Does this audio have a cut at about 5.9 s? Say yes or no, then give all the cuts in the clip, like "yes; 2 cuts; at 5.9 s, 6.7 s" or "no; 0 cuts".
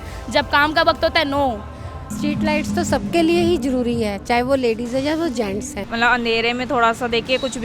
yes; 2 cuts; at 2.1 s, 5.9 s